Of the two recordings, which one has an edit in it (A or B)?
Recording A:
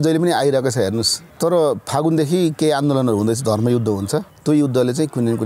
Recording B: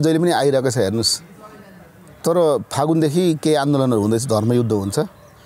A